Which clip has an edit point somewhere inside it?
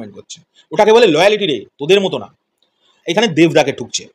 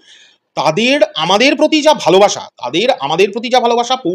first; 1 cut; at 3.0 s

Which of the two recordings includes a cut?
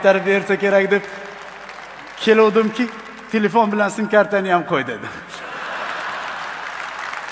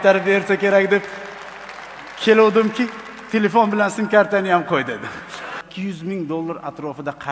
second; 1 cut; at 5.6 s

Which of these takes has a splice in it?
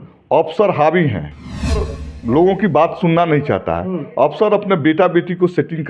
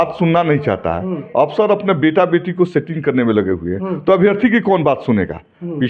first; 1 cut; at 1.8 s

